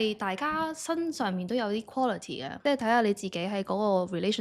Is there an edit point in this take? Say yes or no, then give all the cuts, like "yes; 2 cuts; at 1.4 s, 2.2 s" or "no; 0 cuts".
yes; 1 cut; at 2.4 s